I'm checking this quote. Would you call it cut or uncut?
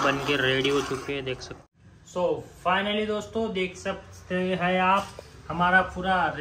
cut